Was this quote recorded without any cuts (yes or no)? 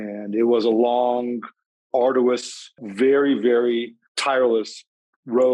no